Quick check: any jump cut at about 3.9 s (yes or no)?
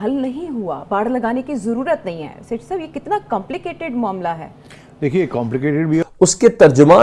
no